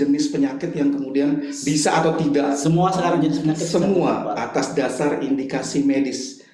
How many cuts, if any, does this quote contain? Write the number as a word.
zero